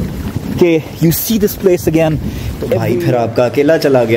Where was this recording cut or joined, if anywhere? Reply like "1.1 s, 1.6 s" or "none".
2.9 s